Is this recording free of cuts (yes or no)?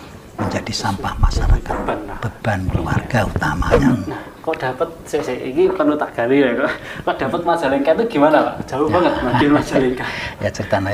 no